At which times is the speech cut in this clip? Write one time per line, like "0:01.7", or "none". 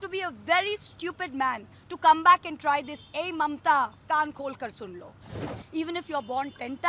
0:05.5